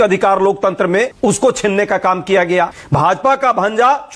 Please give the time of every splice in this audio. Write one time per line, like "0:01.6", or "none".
0:01.1
0:02.8